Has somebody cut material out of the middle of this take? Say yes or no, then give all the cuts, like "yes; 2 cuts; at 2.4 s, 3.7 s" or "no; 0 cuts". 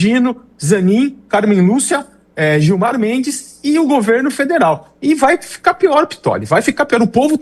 no; 0 cuts